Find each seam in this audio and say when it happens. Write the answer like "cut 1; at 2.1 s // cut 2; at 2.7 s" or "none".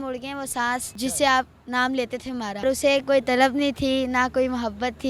cut 1; at 0.9 s // cut 2; at 2.6 s